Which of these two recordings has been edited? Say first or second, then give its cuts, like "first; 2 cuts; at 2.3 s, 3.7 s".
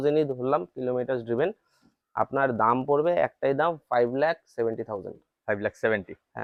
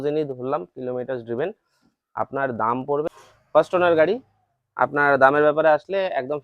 second; 1 cut; at 3.1 s